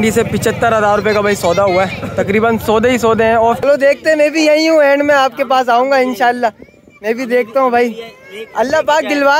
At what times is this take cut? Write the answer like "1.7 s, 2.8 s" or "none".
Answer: 3.6 s